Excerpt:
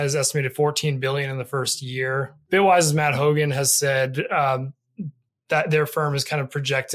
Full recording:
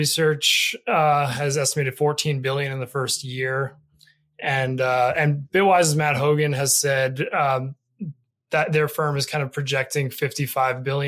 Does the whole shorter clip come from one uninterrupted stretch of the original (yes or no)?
no